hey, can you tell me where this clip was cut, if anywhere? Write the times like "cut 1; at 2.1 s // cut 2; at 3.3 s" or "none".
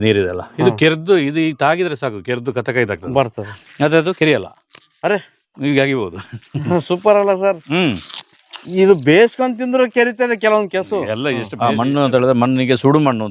cut 1; at 11.5 s